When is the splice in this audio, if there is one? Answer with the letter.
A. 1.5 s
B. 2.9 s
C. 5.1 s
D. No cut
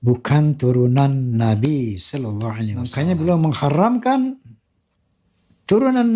B